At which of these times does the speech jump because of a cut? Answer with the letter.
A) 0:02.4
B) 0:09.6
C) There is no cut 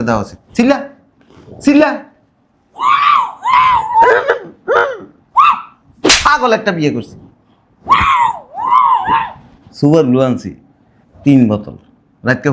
C